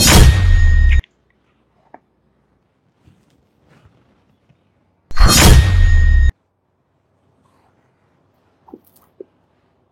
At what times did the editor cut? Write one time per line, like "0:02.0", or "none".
0:00.9
0:02.6